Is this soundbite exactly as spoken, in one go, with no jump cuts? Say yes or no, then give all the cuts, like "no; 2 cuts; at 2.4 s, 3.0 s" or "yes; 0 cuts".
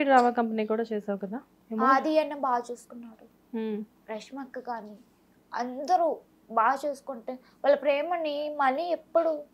yes; 0 cuts